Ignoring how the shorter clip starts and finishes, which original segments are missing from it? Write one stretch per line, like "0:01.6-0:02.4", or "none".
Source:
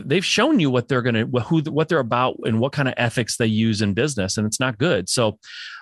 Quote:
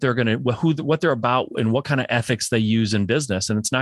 none

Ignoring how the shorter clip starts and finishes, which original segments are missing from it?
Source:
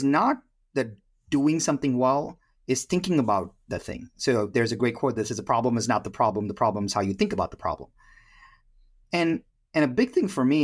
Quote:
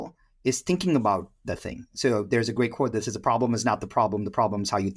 none

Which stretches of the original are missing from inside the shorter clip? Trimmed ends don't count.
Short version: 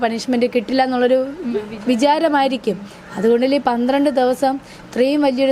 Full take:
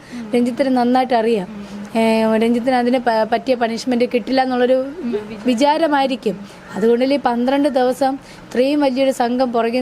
none

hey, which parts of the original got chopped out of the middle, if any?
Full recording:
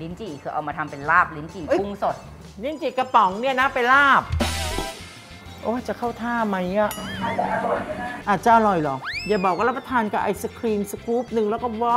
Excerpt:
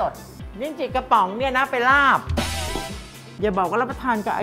0:05.3-0:09.1

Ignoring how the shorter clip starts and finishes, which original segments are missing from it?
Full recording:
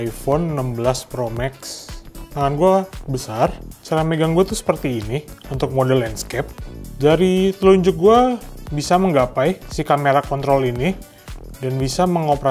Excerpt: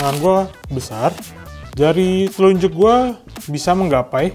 0:03.7-0:06.6

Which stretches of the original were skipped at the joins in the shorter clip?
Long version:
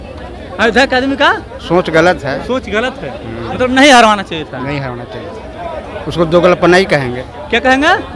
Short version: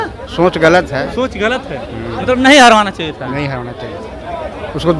none

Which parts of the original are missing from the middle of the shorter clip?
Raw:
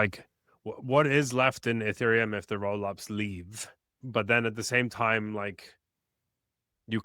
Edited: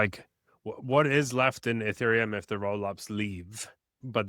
none

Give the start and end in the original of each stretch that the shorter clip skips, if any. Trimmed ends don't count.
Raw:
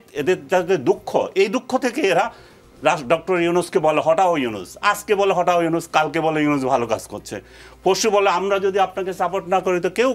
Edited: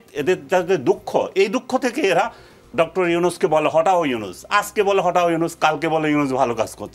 0:02.7-0:03.0

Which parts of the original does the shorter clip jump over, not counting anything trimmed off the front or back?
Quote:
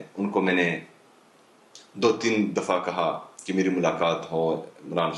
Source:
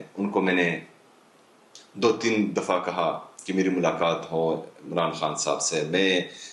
none

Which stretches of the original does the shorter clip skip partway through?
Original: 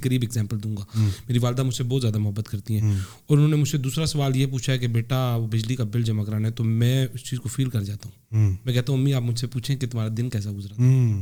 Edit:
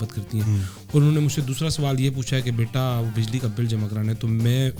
none

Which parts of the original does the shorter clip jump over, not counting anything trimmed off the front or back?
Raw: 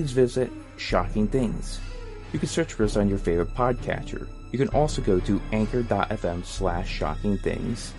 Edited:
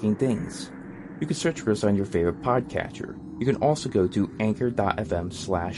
none

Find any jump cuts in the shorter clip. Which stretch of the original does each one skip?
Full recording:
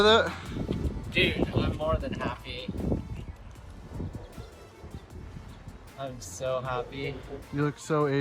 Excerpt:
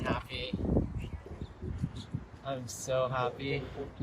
0:03.4-0:04.8

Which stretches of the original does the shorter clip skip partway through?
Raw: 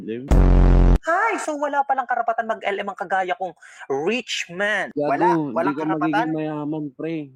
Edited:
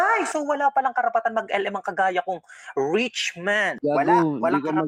none

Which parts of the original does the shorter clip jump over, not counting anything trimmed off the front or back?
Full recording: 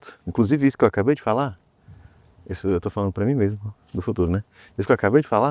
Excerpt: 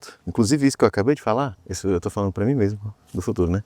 0:01.6-0:02.4

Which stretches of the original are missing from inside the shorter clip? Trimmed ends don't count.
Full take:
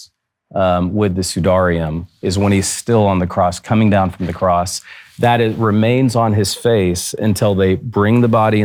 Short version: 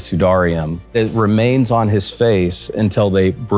0:02.2-0:05.4

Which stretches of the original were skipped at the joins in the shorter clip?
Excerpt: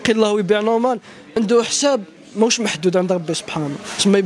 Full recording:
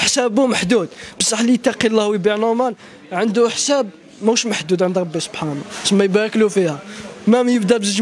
0:02.9-0:03.0

